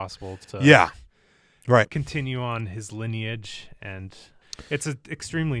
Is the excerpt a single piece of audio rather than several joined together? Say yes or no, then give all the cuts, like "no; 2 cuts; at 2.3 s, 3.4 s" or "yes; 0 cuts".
no; 1 cut; at 4.4 s